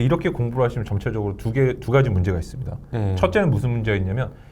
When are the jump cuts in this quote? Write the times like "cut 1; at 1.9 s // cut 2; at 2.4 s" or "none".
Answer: none